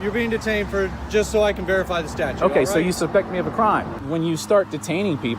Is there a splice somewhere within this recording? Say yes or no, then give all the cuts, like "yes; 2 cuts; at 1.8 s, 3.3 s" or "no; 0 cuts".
yes; 1 cut; at 4.0 s